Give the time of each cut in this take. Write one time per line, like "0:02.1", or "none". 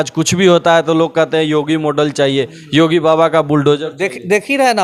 none